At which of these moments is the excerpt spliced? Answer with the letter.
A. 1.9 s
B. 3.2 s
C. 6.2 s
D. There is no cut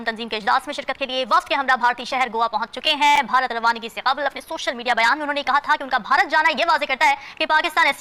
D